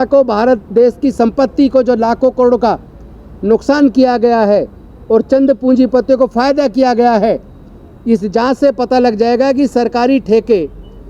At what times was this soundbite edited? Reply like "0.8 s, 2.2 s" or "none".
none